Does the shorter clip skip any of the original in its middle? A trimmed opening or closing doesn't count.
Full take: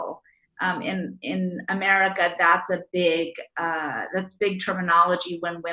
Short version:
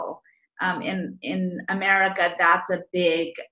no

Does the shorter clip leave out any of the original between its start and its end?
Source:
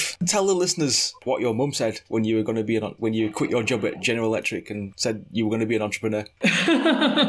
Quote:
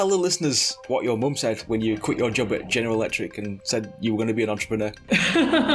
yes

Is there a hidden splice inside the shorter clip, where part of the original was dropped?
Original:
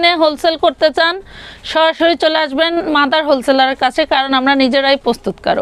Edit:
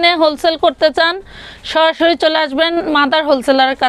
no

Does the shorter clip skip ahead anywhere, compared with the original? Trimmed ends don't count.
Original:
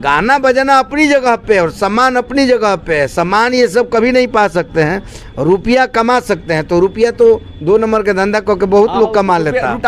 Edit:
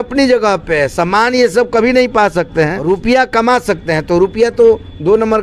yes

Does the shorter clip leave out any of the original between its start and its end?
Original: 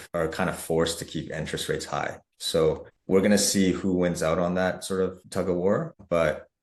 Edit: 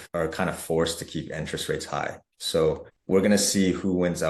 no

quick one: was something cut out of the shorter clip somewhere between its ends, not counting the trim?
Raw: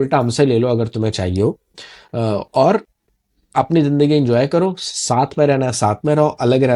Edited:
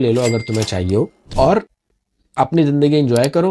yes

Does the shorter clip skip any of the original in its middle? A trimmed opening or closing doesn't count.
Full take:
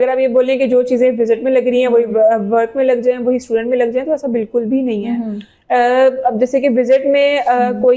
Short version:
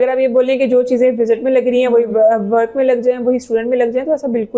no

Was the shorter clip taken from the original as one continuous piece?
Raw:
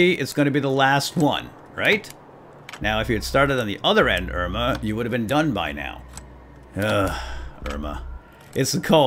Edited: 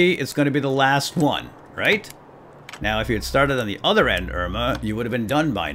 yes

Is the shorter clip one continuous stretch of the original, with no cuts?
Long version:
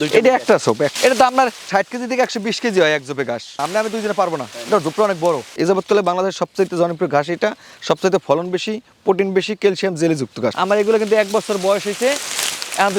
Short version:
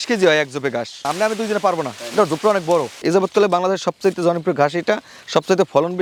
yes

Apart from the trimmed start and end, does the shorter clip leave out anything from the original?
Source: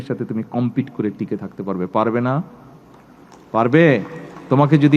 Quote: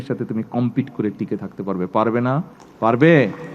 yes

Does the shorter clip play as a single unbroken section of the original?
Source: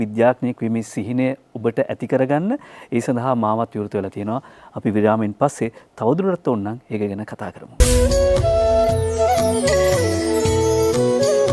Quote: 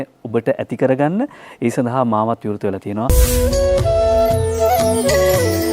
no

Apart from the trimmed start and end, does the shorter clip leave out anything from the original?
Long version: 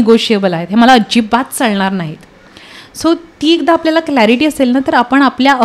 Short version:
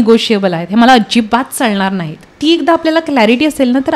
yes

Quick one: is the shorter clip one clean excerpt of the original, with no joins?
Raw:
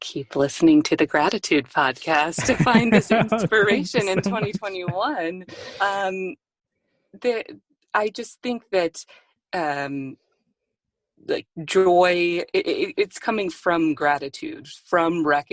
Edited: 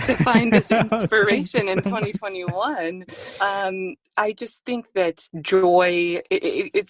no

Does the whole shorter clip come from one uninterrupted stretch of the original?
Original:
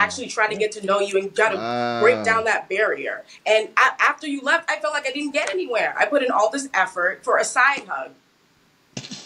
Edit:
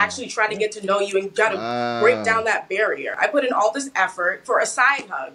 no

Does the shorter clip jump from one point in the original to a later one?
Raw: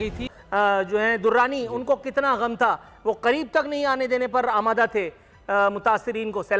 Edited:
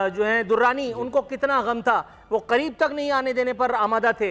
no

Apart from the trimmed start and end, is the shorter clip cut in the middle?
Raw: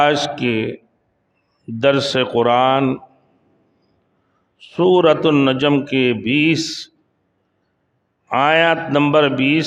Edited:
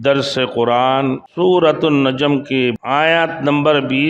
yes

